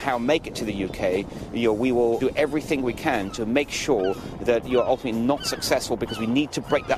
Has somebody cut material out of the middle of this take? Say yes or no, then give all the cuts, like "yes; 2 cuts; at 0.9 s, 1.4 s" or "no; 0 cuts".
yes; 2 cuts; at 2.2 s, 3.3 s